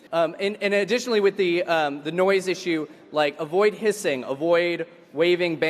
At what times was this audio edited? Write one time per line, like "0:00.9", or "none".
none